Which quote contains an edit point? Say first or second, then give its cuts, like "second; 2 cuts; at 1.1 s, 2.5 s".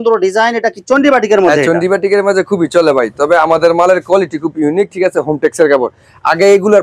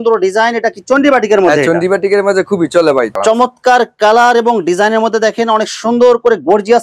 second; 1 cut; at 3.1 s